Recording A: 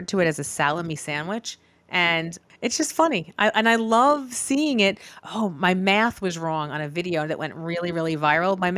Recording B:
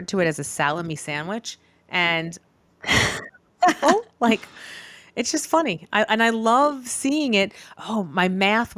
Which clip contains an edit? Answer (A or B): A